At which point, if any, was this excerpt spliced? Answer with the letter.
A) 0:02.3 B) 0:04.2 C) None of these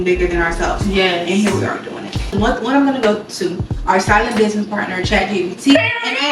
A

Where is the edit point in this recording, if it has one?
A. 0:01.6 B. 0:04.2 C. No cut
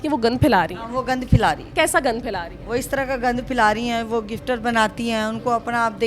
A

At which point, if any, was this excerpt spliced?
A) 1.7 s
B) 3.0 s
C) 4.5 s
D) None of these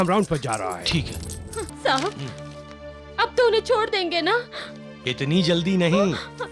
A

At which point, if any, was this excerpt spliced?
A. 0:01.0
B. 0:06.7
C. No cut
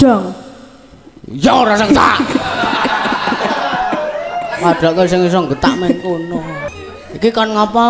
B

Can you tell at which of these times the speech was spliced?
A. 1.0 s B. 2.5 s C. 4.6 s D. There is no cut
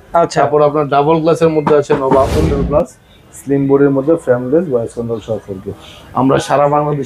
B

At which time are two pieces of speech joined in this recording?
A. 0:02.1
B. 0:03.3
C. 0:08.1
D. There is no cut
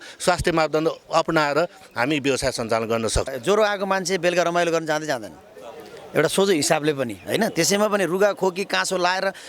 B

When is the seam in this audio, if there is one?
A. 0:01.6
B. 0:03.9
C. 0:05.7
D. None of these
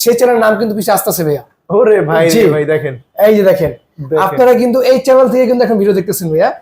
D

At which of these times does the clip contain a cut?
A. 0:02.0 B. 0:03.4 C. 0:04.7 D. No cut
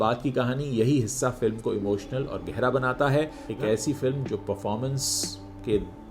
B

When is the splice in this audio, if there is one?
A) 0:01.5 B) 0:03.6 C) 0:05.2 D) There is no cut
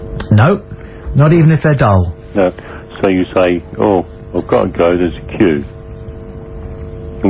C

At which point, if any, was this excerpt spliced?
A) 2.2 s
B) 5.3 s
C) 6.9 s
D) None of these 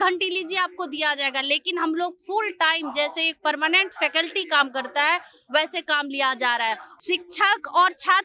C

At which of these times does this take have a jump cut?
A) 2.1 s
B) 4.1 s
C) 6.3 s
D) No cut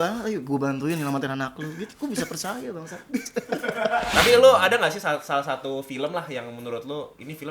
B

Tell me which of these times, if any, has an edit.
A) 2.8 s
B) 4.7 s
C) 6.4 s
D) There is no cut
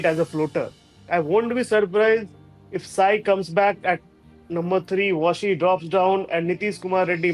D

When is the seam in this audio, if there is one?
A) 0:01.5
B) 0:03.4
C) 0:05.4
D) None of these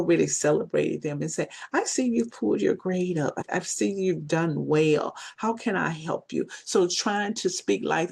B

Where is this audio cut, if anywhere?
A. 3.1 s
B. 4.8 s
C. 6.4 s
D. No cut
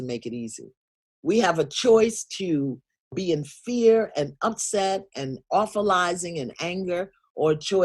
A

